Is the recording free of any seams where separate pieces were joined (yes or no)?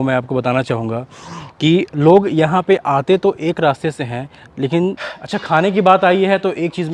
no